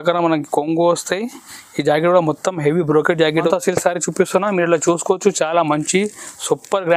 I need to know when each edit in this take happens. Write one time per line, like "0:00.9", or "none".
0:03.5